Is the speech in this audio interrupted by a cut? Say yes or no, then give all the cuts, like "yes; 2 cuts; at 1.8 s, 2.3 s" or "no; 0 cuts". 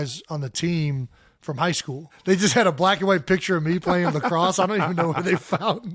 yes; 1 cut; at 2.1 s